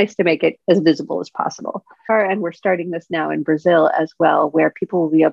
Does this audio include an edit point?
yes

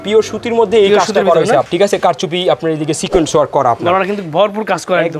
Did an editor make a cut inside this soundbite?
yes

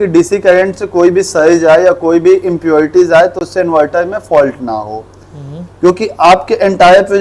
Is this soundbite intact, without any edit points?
yes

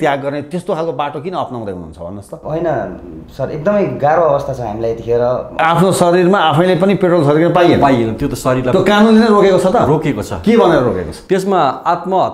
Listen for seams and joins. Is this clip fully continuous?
no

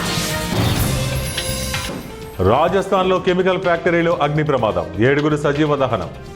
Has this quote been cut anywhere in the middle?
yes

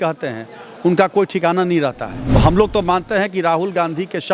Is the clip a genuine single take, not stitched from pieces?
no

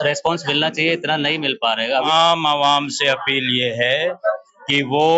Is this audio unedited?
no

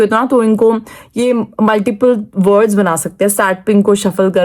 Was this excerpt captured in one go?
yes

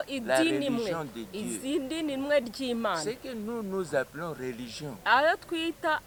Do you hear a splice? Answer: no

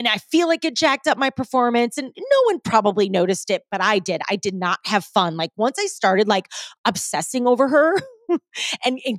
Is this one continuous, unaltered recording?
yes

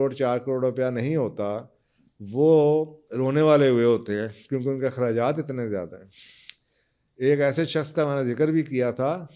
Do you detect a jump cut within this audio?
no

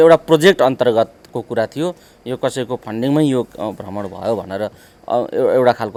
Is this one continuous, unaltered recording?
yes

